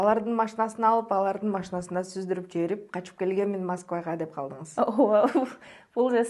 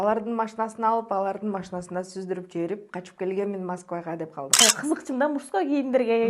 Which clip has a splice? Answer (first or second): second